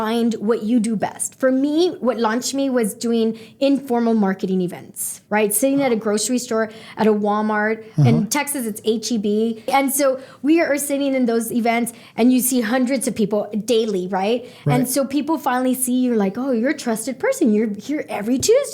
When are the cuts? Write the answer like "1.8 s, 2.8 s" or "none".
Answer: 9.7 s